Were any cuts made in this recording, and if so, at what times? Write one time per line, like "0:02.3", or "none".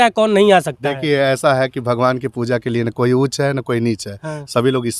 none